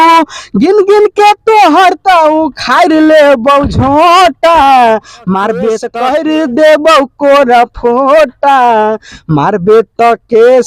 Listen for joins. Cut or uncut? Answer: cut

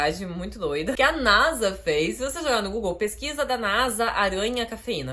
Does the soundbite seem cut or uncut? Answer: cut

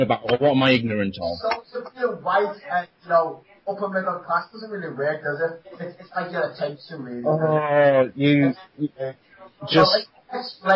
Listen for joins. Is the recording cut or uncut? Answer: cut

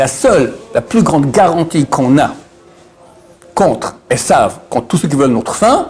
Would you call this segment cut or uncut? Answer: uncut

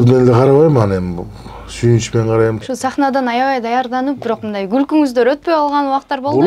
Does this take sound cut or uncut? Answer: cut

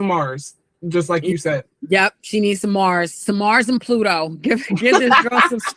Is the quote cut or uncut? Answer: uncut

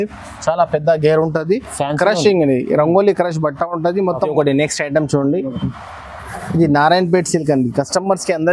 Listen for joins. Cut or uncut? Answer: cut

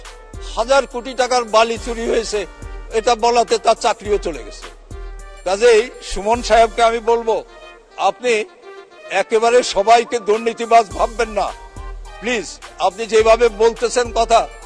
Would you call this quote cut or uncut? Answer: uncut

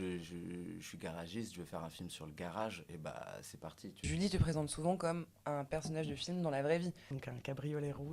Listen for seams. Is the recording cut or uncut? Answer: cut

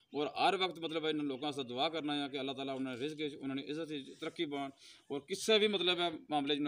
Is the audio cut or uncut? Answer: uncut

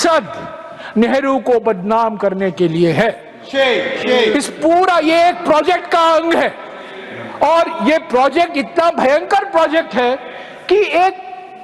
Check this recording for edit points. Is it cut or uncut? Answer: uncut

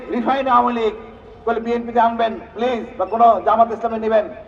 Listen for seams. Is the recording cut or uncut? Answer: uncut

